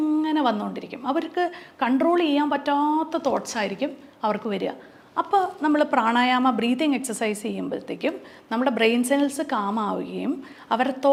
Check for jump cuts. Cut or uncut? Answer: uncut